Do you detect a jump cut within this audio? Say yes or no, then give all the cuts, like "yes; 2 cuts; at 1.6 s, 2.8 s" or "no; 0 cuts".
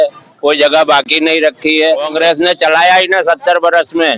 yes; 1 cut; at 2.1 s